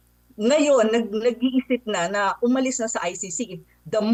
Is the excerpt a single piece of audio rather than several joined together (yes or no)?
yes